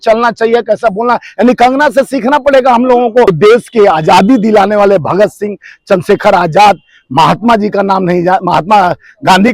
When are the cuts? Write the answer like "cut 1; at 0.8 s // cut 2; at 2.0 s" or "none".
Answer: cut 1; at 3.3 s